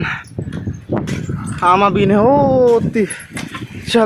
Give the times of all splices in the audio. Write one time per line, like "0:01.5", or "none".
none